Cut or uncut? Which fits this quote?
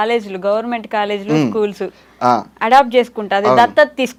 uncut